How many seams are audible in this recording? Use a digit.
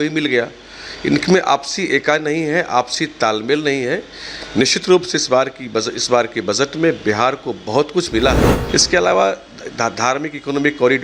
1